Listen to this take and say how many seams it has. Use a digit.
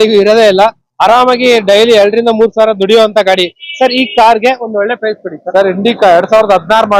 0